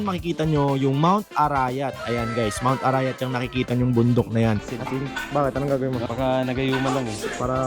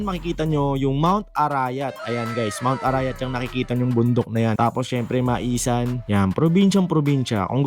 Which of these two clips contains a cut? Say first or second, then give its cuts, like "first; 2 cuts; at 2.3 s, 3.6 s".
first; 2 cuts; at 4.6 s, 6.1 s